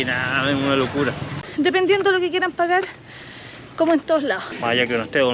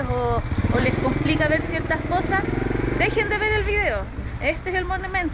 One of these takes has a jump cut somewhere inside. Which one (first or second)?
first